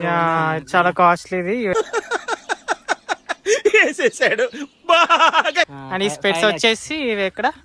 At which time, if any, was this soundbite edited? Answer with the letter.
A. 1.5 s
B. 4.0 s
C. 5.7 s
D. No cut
C